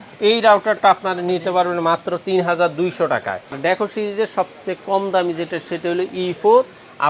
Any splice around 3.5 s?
yes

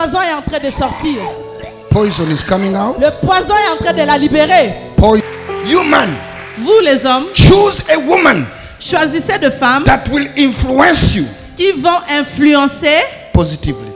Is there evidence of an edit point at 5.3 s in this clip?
yes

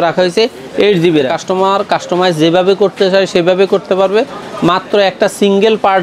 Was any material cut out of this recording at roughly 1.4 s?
yes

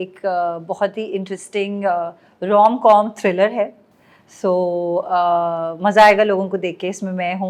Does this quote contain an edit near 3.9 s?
no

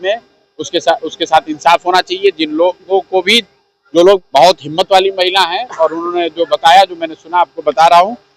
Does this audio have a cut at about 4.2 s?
yes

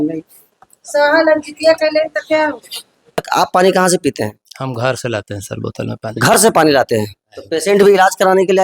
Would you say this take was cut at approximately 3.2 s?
yes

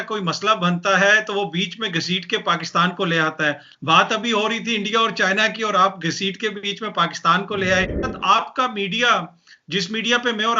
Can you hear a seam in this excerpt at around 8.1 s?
yes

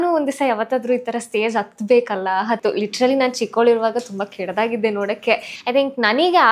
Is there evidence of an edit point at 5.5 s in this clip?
yes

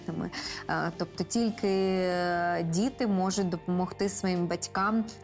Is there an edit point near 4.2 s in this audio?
no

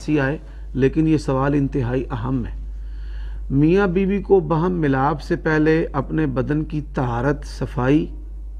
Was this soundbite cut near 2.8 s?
no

